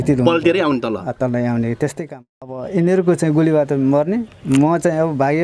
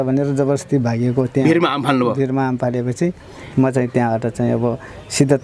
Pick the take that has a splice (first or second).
first